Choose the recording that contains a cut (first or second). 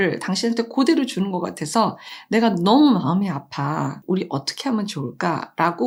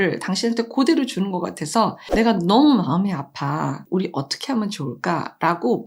second